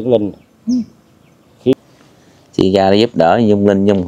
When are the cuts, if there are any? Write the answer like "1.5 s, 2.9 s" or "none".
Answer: 1.8 s